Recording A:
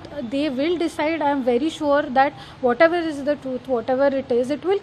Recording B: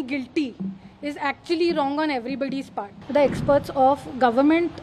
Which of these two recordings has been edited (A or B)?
B